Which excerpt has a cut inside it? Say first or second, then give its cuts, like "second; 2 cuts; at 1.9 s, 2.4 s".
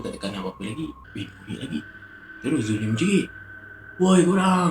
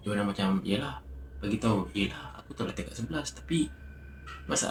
first; 1 cut; at 1.0 s